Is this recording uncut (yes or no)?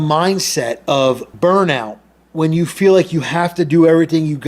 no